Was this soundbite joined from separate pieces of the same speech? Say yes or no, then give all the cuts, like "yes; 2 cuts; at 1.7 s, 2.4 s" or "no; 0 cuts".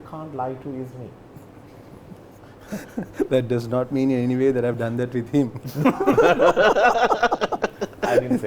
no; 0 cuts